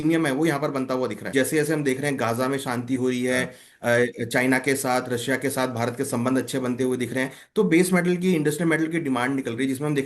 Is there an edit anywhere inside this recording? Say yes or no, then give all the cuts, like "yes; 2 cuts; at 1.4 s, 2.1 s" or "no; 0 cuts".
yes; 1 cut; at 1.2 s